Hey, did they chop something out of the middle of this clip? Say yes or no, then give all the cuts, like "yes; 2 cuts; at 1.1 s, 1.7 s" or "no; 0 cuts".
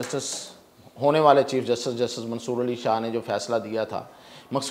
no; 0 cuts